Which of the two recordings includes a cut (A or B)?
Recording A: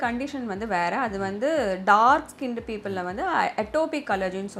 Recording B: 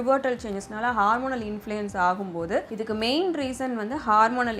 B